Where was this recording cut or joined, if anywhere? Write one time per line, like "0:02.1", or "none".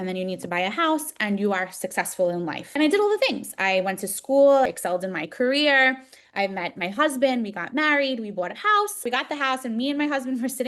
0:02.7
0:04.7
0:09.1

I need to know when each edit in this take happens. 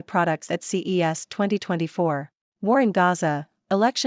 0:02.4

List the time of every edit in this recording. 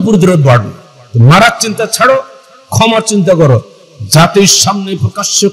none

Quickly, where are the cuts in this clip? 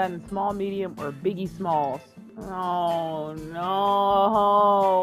none

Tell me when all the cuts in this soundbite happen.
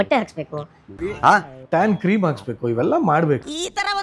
0:01.0

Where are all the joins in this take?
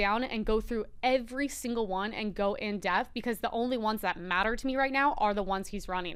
none

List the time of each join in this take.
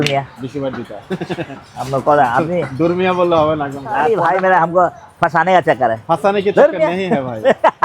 0:04.0

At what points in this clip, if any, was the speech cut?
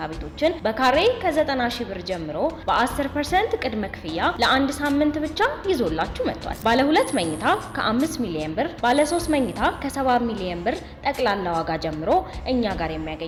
none

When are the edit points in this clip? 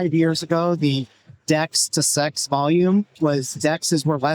0:03.1

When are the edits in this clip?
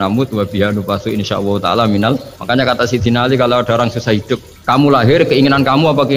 0:02.3
0:04.5

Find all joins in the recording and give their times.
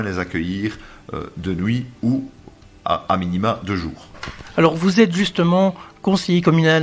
none

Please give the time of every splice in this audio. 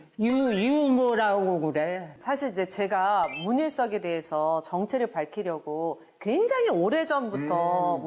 0:02.1

